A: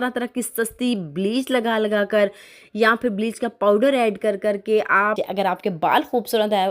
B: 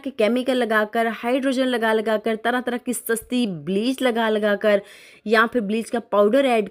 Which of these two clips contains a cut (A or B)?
A